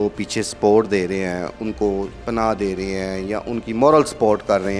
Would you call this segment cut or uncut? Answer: uncut